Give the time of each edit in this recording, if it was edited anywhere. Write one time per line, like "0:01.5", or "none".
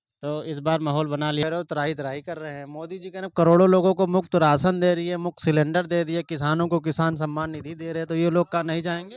0:01.4

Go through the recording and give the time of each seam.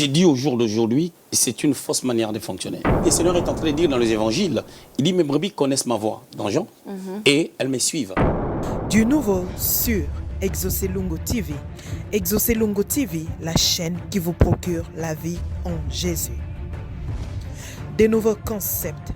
0:01.3
0:03.0
0:08.3

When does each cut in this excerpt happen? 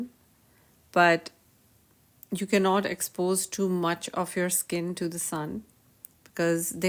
none

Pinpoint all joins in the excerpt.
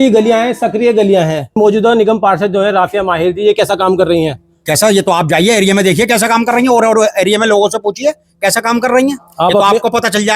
0:01.6

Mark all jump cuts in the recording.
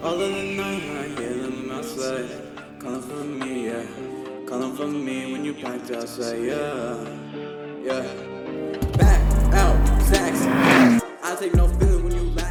none

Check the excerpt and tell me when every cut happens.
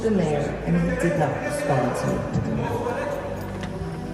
none

